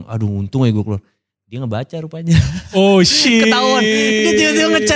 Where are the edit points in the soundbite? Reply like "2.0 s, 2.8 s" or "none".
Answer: none